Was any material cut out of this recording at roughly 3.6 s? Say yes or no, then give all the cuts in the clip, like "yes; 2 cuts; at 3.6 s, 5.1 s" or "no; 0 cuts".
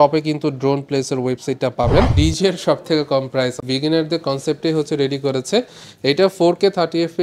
yes; 2 cuts; at 2.1 s, 3.6 s